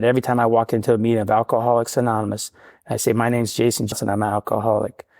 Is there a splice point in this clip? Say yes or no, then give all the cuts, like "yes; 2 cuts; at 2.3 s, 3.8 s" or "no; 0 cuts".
yes; 1 cut; at 3.9 s